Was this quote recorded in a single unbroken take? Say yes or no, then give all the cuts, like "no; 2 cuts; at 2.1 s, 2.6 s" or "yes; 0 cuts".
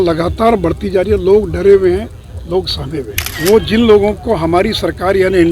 no; 1 cut; at 3.2 s